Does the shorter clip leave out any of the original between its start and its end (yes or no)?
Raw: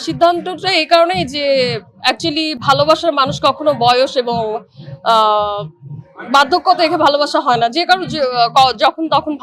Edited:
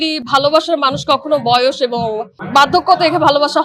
yes